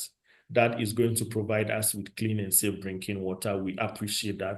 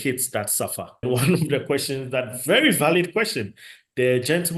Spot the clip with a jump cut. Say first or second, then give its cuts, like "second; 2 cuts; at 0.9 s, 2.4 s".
second; 1 cut; at 1.0 s